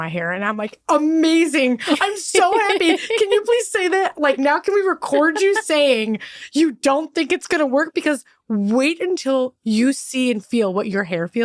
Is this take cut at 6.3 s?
no; 0 cuts

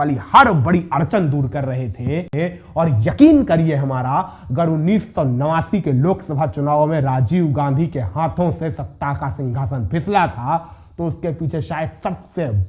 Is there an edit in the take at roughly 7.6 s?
no; 1 cut; at 2.3 s

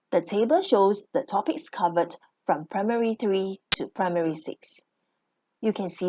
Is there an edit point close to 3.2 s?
no; 1 cut; at 1.0 s

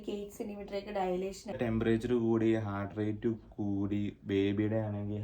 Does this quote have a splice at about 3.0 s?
no; 1 cut; at 1.6 s

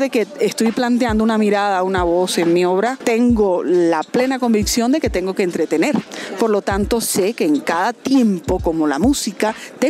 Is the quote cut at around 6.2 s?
yes; 2 cuts; at 3.0 s, 6.2 s

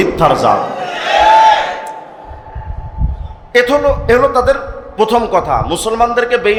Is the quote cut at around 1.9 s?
no; 0 cuts

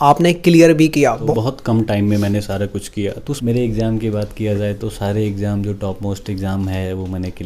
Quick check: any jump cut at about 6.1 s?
no; 2 cuts; at 1.2 s, 3.4 s

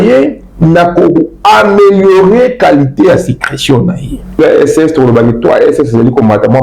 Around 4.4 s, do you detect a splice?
yes; 1 cut; at 4.4 s

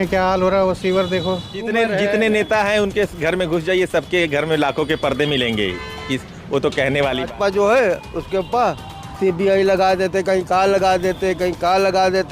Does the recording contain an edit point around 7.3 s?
yes; 2 cuts; at 1.5 s, 7.3 s

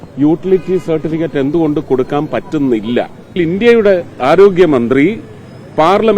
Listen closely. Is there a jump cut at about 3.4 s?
yes; 1 cut; at 3.4 s

